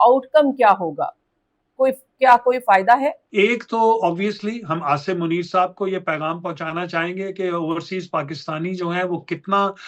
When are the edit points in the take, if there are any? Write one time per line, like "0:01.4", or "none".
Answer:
0:03.2